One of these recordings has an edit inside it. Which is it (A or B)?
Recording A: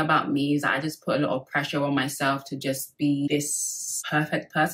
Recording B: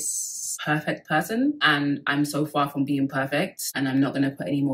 B